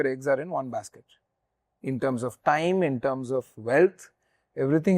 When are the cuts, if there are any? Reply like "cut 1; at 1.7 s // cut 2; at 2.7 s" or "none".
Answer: none